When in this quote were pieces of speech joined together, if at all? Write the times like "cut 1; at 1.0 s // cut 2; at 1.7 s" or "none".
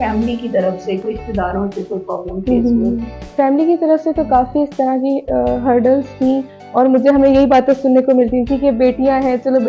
cut 1; at 1.0 s // cut 2; at 3.2 s // cut 3; at 6.6 s